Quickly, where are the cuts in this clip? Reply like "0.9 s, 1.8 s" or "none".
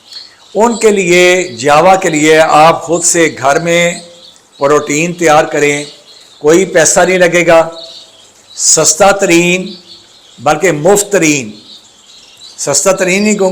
none